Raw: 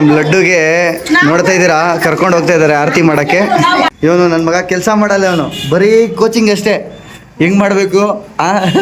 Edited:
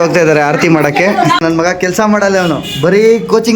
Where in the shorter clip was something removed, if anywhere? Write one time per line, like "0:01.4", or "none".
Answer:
0:01.4